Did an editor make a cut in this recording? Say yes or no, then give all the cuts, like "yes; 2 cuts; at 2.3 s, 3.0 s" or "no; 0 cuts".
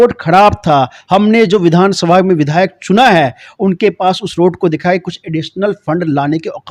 no; 0 cuts